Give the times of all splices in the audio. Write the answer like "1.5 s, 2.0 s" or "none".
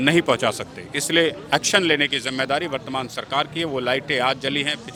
none